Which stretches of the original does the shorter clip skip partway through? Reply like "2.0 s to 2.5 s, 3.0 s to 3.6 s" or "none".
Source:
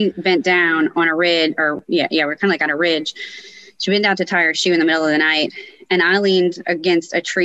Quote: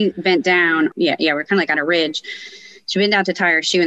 0.9 s to 1.8 s